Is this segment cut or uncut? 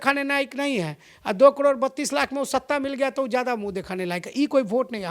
uncut